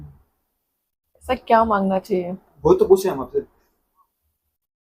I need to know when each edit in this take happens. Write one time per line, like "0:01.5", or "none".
none